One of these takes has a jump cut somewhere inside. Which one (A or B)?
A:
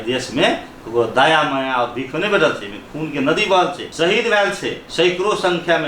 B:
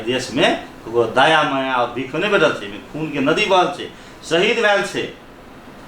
A